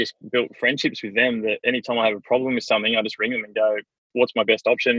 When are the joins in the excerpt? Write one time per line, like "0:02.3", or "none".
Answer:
0:04.1